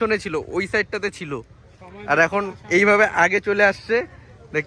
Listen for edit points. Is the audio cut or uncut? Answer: uncut